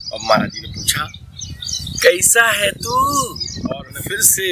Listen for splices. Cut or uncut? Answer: cut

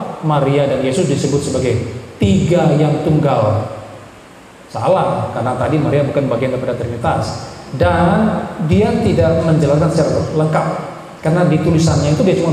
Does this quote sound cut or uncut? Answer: uncut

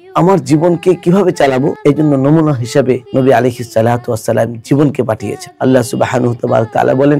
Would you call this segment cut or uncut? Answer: cut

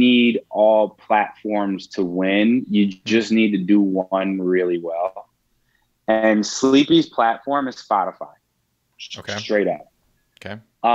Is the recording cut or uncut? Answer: uncut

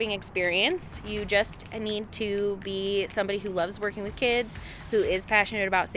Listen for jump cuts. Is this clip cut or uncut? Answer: uncut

